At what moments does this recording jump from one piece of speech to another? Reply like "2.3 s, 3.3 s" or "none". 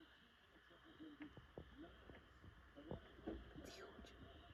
none